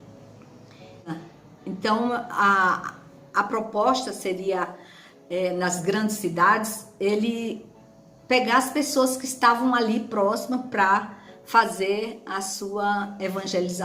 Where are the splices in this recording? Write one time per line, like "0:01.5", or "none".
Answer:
0:01.0